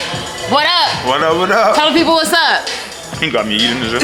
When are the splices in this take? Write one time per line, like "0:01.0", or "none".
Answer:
none